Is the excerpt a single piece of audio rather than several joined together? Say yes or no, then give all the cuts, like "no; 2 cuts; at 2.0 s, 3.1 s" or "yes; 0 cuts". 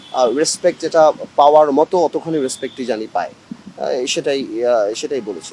yes; 0 cuts